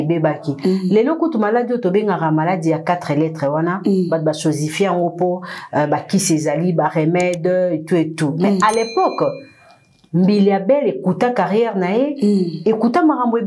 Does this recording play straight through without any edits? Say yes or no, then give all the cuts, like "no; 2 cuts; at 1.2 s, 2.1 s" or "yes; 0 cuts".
yes; 0 cuts